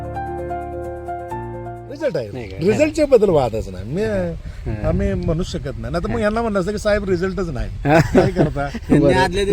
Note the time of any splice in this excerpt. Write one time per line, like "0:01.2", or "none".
0:02.0